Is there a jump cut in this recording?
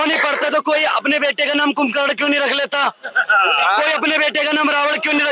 no; 0 cuts

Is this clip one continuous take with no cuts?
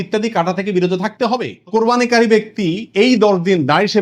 no; 1 cut; at 1.6 s

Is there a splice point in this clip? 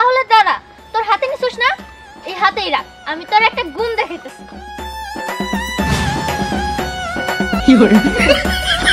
yes; 1 cut; at 7.6 s

